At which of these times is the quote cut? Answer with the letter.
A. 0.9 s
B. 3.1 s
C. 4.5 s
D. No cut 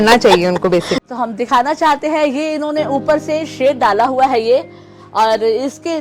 A